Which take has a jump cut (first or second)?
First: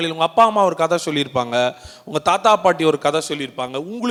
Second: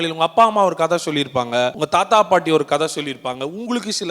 second